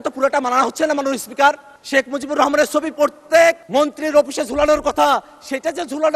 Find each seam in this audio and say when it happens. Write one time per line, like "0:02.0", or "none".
0:01.7
0:03.6